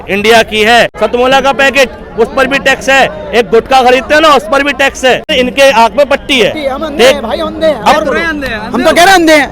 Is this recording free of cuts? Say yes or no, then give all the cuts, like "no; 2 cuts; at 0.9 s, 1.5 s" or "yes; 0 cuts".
no; 2 cuts; at 0.9 s, 5.3 s